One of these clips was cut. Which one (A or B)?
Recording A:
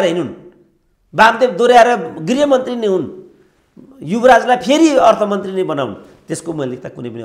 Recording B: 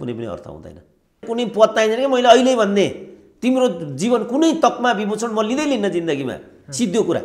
B